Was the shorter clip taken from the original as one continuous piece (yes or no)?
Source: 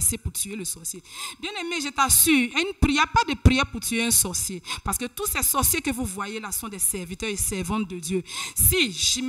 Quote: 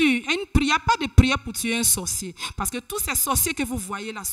yes